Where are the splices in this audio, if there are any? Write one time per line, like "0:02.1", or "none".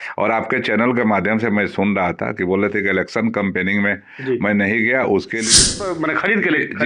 0:05.5